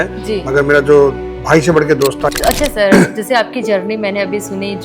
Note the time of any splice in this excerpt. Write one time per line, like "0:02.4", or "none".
0:02.3